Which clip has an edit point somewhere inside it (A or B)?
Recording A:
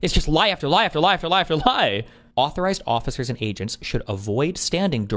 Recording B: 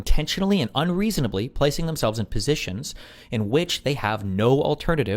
A